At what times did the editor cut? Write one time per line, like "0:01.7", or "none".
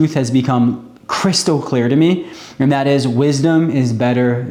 none